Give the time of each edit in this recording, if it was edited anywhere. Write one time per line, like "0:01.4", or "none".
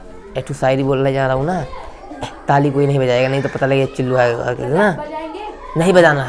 none